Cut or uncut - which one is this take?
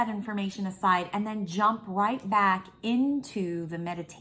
uncut